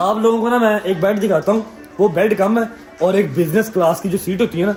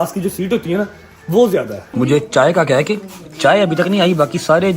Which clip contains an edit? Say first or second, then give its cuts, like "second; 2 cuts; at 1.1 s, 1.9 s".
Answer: second; 1 cut; at 1.8 s